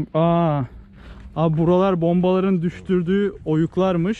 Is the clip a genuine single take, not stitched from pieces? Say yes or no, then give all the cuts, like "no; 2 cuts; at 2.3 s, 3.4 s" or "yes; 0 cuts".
yes; 0 cuts